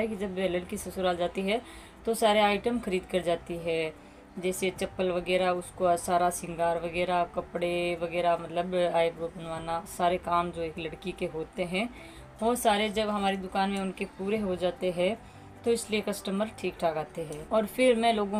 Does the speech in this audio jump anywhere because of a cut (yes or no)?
no